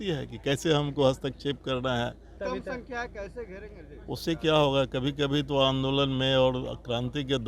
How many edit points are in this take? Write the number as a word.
one